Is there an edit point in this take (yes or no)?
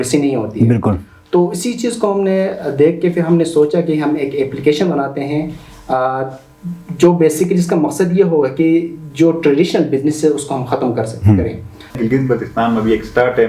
yes